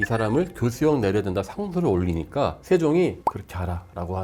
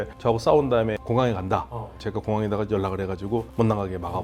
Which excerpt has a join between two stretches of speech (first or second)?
second